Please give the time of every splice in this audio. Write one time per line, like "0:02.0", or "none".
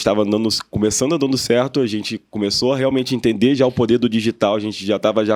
none